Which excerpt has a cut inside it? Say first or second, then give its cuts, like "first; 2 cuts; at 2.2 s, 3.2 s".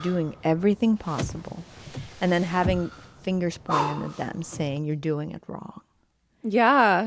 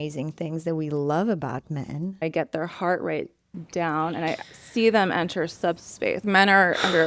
second; 3 cuts; at 2.2 s, 4.5 s, 6.2 s